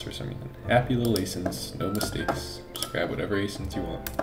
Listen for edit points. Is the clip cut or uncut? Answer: uncut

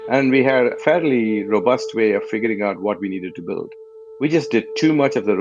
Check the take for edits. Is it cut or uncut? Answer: cut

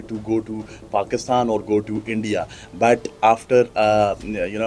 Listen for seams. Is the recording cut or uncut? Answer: uncut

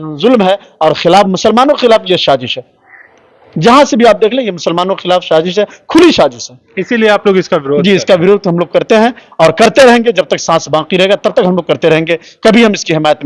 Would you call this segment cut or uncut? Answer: uncut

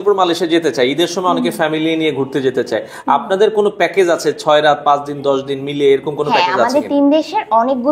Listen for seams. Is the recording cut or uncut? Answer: uncut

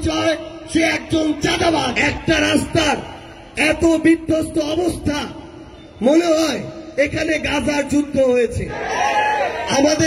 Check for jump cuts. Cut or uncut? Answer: cut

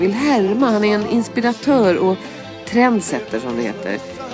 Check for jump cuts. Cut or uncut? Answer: cut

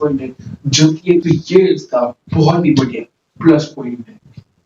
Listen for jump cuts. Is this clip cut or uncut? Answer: cut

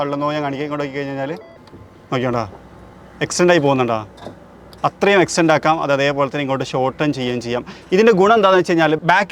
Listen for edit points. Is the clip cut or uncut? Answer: uncut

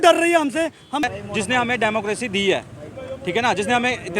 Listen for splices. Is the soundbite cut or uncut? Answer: cut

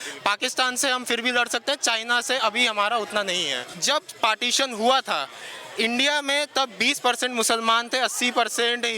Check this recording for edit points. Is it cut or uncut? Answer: cut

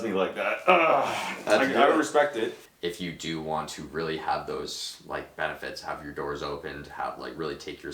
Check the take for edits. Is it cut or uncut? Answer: cut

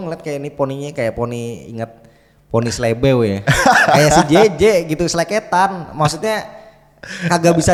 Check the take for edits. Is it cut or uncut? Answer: uncut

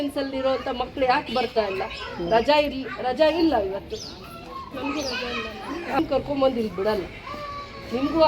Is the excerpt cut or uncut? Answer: cut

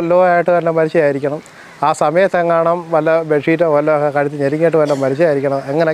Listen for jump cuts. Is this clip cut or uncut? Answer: uncut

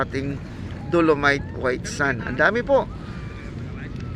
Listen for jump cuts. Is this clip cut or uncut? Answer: uncut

